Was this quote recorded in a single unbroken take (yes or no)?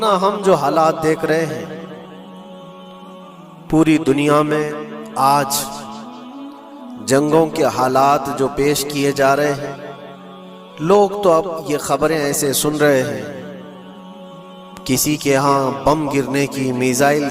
yes